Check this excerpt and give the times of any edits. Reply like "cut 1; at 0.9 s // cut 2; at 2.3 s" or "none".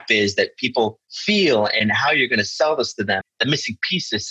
cut 1; at 1.1 s // cut 2; at 1.8 s // cut 3; at 3.4 s